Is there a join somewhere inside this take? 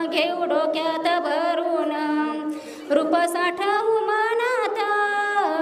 no; 0 cuts

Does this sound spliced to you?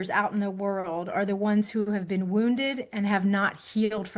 no; 0 cuts

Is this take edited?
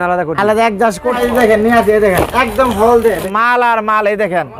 yes; 2 cuts; at 1.1 s, 3.3 s

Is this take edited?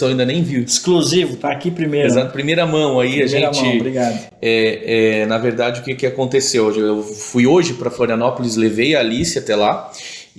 no; 0 cuts

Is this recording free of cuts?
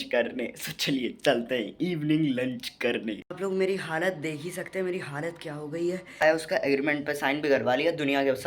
no; 2 cuts; at 2.7 s, 6.2 s

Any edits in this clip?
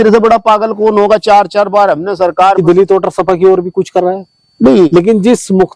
yes; 2 cuts; at 2.5 s, 4.9 s

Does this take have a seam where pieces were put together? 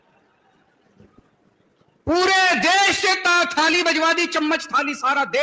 no; 0 cuts

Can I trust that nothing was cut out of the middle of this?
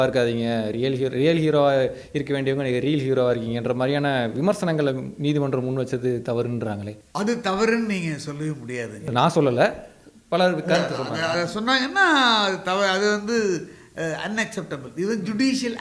yes; 0 cuts

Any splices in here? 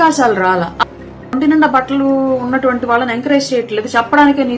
yes; 1 cut; at 1.3 s

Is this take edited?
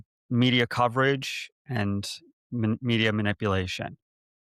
no; 0 cuts

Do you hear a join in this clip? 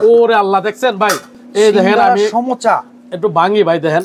no; 0 cuts

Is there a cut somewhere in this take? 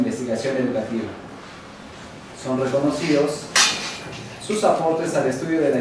yes; 1 cut; at 3.9 s

